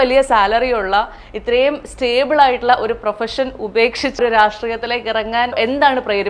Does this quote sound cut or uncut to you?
cut